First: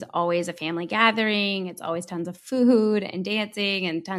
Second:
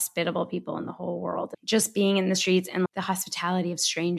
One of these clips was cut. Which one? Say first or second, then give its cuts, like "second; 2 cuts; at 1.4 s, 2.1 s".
second; 2 cuts; at 1.5 s, 2.9 s